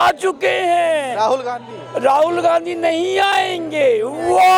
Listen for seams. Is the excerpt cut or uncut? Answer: uncut